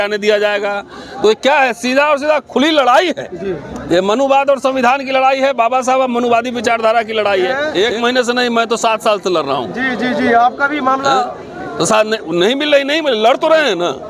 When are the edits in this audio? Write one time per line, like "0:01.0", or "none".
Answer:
0:07.6